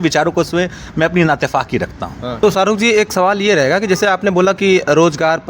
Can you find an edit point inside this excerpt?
yes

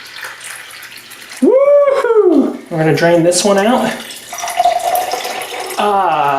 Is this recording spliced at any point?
yes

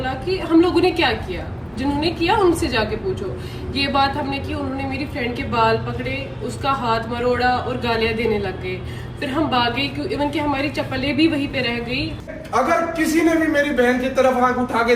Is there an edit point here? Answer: yes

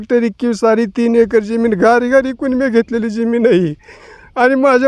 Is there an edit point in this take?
no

